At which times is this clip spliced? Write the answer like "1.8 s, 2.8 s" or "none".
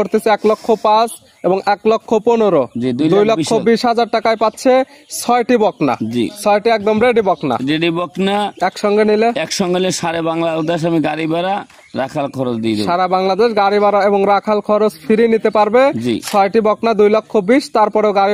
none